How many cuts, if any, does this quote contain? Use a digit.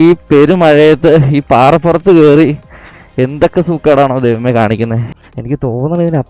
1